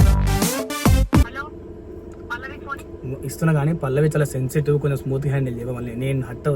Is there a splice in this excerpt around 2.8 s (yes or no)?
no